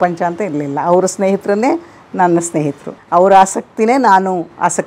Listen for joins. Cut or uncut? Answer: cut